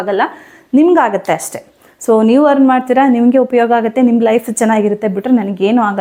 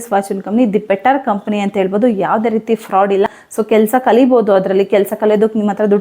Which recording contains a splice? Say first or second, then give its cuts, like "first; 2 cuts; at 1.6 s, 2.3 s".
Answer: second; 1 cut; at 3.3 s